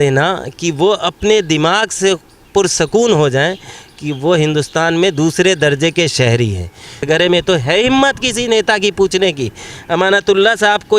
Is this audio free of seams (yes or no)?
no